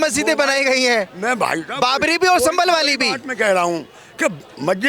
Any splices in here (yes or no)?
no